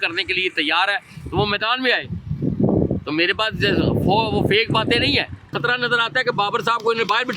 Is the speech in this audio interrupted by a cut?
yes; 1 cut; at 5.5 s

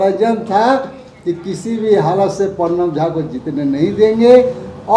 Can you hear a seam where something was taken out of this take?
no; 0 cuts

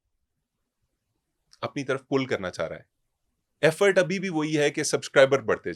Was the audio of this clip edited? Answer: no; 0 cuts

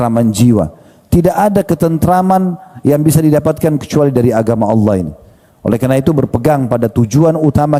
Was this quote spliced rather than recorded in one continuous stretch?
no; 0 cuts

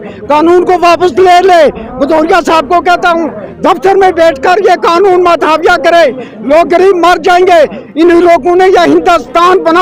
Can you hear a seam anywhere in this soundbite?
no; 0 cuts

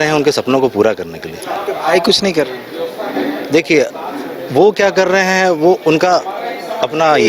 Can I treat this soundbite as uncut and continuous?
yes; 0 cuts

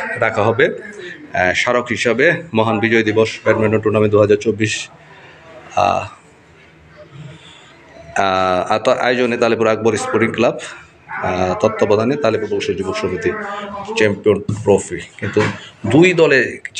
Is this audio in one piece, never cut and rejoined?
yes; 0 cuts

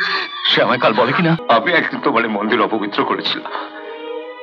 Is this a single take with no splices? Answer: no; 1 cut; at 1.4 s

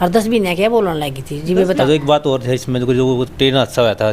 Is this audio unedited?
no; 1 cut; at 1.8 s

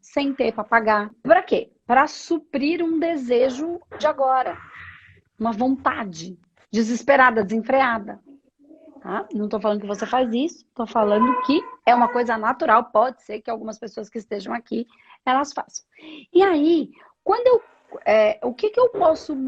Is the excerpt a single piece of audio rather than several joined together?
no; 1 cut; at 1.1 s

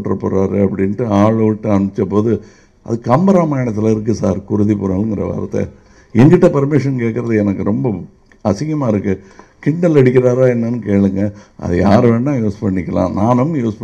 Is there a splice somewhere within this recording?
no; 0 cuts

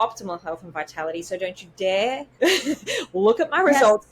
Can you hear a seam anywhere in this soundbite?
no; 0 cuts

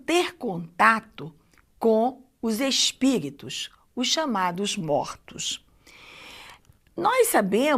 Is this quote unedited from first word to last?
no; 1 cut; at 4.9 s

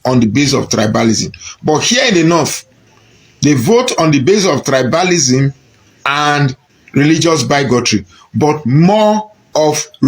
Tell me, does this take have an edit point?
no; 0 cuts

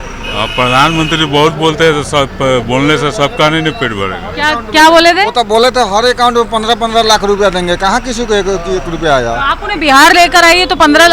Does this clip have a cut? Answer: yes; 1 cut; at 5.3 s

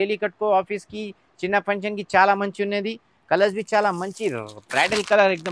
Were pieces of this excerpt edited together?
no; 0 cuts

